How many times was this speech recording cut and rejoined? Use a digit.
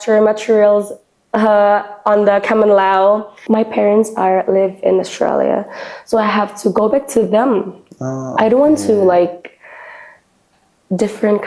1